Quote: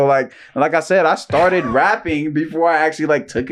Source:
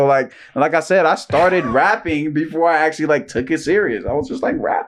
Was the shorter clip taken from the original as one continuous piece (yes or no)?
yes